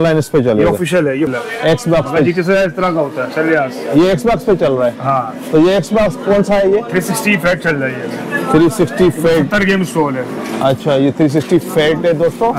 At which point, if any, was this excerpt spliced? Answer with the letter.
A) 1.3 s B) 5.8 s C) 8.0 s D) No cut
A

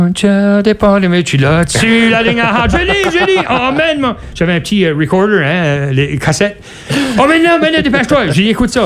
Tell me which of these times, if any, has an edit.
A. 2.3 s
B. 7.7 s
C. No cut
C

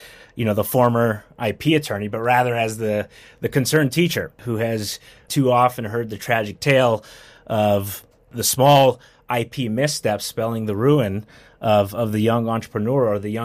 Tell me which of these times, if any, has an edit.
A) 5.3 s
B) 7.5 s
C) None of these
A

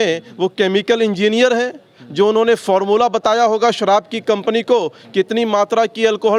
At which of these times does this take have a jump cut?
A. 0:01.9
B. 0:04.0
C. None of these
C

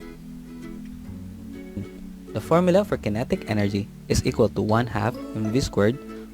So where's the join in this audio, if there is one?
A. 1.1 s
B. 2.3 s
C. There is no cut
A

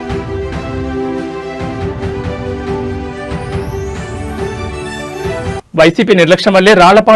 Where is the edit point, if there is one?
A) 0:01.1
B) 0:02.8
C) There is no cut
B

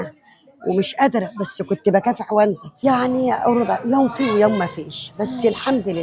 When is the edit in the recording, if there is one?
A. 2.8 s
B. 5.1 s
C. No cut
A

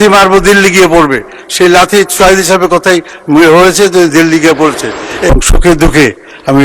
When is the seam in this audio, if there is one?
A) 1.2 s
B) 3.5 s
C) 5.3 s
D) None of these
C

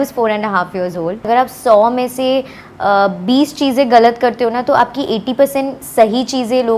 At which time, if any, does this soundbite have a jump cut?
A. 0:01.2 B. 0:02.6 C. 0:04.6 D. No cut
A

